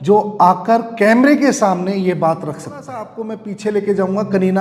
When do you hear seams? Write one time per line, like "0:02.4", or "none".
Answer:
0:03.1